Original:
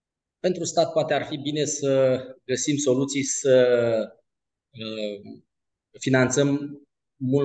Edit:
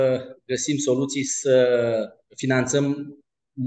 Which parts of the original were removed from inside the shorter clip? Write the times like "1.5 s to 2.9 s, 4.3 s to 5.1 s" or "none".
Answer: 4.2 s to 5.9 s